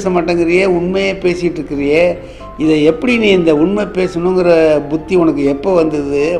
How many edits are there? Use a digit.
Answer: 0